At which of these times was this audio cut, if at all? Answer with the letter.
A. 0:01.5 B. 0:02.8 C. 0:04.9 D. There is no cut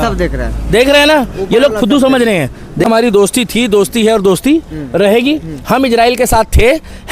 B